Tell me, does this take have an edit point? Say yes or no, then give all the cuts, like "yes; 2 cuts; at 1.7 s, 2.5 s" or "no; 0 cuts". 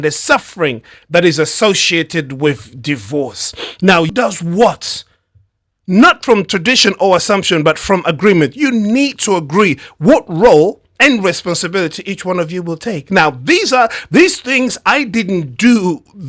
yes; 1 cut; at 4.1 s